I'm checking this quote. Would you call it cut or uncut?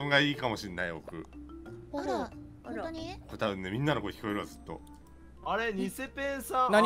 uncut